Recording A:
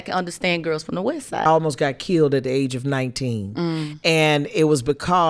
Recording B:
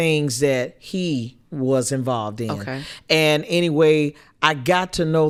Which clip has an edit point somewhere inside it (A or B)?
A